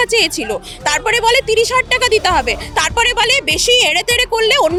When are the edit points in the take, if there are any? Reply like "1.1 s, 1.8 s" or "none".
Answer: none

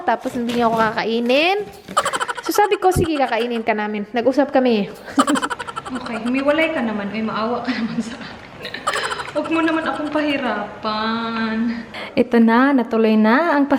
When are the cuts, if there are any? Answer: 5.5 s, 11.9 s

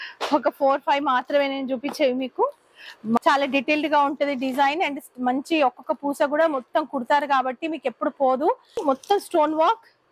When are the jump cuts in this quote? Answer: 3.2 s, 8.8 s

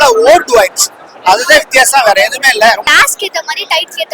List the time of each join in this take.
2.8 s

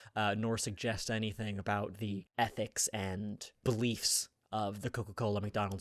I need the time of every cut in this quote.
2.3 s, 3.6 s

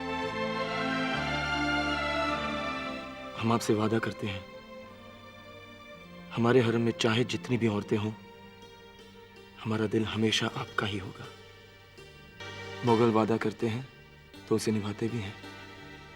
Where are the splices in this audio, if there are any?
0.9 s, 2.7 s, 12.5 s

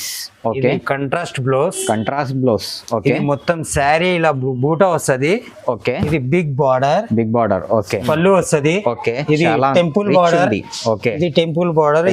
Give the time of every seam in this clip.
8.0 s

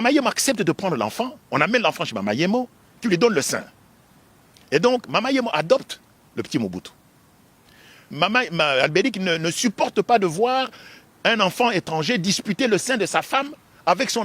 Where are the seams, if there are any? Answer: 8.1 s

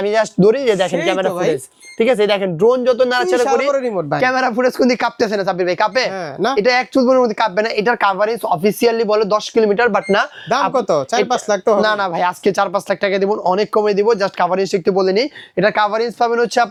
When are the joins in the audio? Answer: none

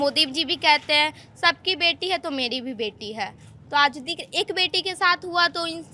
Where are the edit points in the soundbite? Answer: none

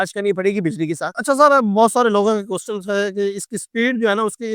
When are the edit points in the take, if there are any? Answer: 1.1 s

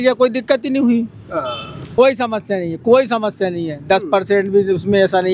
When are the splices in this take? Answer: 1.8 s

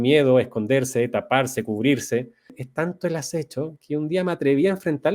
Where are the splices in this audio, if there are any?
2.6 s

